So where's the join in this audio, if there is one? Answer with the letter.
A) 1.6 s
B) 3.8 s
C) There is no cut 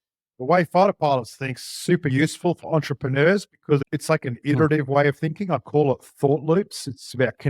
B